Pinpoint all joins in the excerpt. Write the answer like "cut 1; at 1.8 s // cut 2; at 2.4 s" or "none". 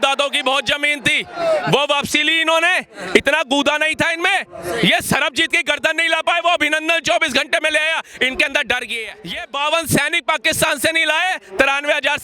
cut 1; at 9.4 s